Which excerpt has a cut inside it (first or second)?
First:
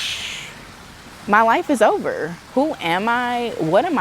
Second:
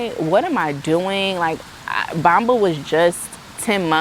first